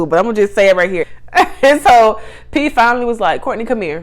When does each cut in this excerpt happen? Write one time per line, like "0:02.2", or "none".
0:01.0